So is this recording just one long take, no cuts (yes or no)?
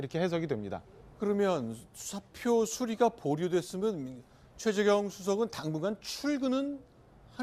yes